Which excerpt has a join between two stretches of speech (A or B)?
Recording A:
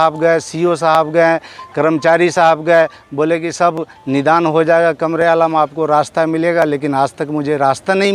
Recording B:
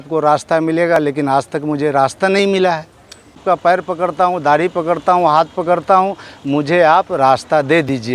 B